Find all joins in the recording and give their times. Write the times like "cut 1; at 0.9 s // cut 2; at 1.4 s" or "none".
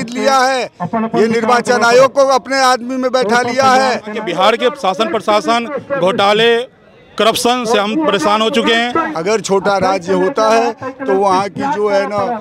cut 1; at 4.2 s // cut 2; at 9.1 s